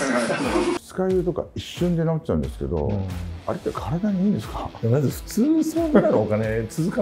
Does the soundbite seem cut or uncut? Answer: cut